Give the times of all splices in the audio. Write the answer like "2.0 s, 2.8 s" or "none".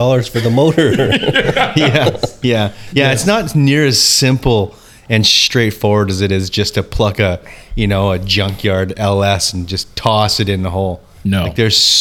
none